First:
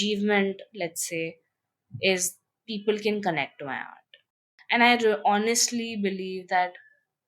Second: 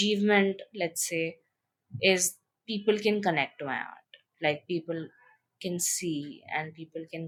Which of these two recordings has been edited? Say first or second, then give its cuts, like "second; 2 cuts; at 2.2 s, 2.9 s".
first; 1 cut; at 4.3 s